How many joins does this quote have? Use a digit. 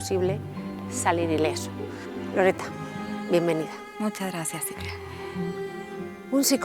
0